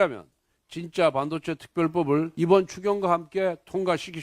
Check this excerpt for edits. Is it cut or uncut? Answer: cut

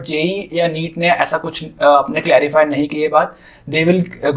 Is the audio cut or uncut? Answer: uncut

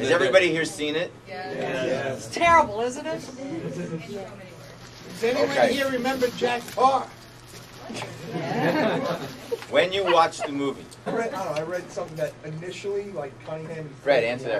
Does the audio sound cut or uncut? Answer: uncut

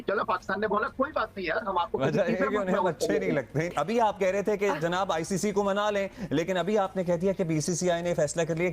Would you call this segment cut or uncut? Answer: cut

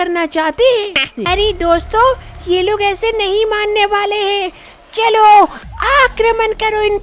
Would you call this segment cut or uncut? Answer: cut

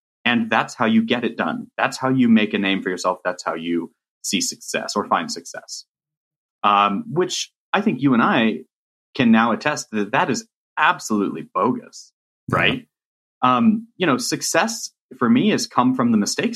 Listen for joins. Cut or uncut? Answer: uncut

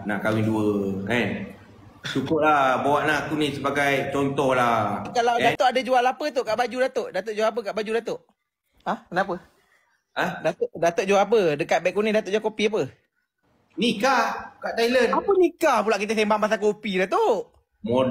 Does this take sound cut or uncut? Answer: cut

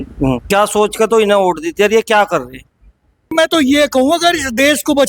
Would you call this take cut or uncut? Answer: cut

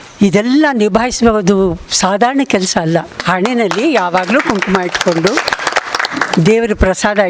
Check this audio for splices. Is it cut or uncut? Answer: cut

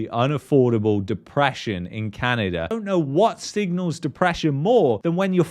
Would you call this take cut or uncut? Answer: cut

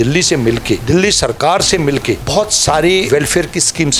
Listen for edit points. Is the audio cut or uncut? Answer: cut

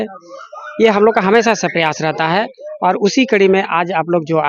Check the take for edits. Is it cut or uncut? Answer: uncut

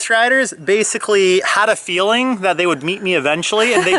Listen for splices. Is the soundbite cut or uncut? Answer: uncut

